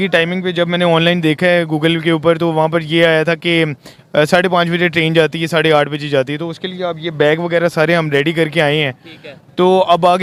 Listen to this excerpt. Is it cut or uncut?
uncut